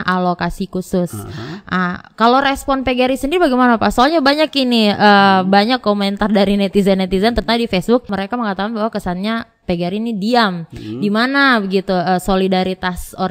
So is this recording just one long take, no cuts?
yes; 0 cuts

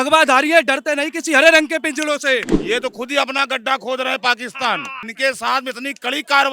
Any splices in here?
yes; 2 cuts; at 2.5 s, 5.0 s

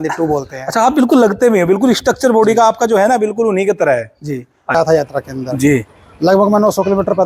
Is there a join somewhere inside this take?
yes; 1 cut; at 4.7 s

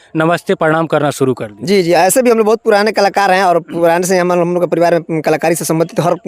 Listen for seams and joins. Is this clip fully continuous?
yes; 0 cuts

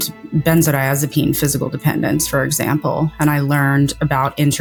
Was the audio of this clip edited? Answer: no; 0 cuts

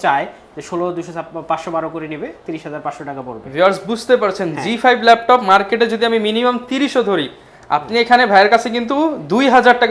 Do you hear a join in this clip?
no; 0 cuts

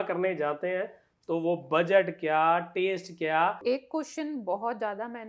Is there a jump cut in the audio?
yes; 1 cut; at 3.6 s

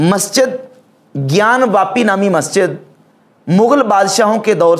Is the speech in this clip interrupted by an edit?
no; 0 cuts

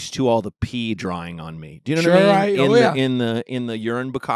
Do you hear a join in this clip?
no; 0 cuts

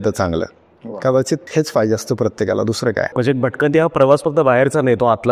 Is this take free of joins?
no; 2 cuts; at 1.5 s, 3.1 s

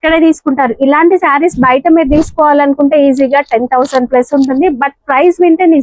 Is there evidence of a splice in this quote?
no; 0 cuts

